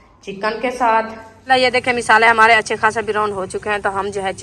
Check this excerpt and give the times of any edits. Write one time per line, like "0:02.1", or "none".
0:01.5